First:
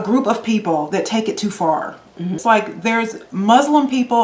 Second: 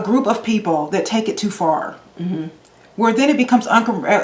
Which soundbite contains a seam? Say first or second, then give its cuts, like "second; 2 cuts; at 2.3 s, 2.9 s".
first; 1 cut; at 2.4 s